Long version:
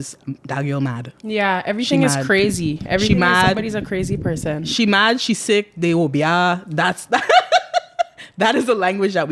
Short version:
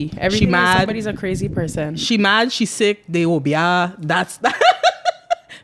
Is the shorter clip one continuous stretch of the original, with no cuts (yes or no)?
yes